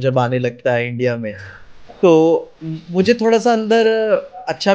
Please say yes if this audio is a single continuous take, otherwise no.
yes